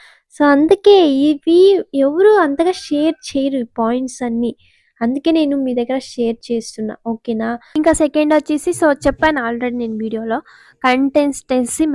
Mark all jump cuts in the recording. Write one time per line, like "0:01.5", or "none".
0:07.6